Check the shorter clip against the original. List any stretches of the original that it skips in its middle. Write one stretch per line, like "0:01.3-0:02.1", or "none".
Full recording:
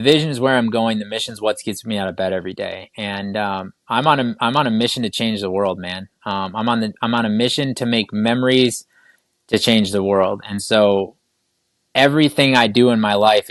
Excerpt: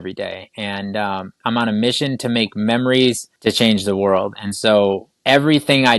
0:03.8-0:06.9
0:08.8-0:09.3
0:11.2-0:11.8